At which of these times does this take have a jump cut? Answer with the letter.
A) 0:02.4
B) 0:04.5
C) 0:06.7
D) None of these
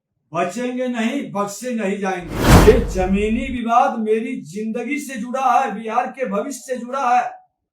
A